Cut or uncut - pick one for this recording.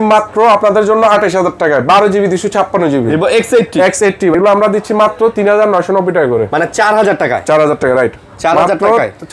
cut